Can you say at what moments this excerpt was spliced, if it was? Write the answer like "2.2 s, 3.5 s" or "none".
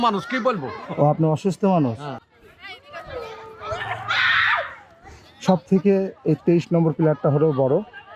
0.9 s, 2.1 s